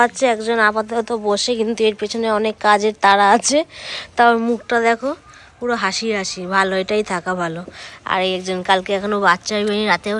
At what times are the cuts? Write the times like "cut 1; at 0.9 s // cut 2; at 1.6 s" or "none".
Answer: none